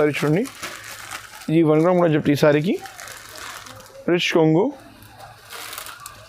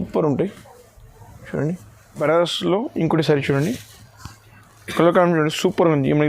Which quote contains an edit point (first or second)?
second